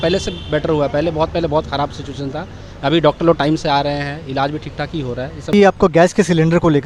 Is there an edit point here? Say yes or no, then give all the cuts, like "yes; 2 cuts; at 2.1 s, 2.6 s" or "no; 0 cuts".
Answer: yes; 1 cut; at 5.5 s